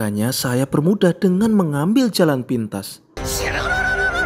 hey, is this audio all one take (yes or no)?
yes